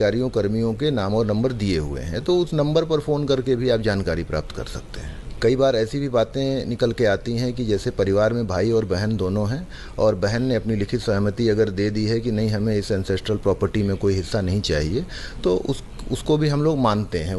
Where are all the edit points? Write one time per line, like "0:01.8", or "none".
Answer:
0:05.2